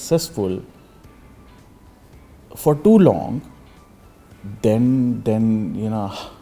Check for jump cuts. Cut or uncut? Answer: uncut